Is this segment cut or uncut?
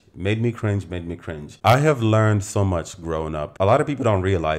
uncut